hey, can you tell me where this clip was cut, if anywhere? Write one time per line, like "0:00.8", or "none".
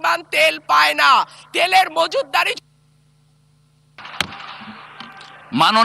0:04.0